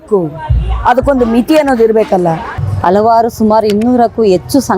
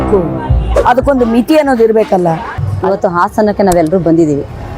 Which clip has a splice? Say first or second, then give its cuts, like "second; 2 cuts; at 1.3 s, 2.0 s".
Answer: second; 1 cut; at 2.8 s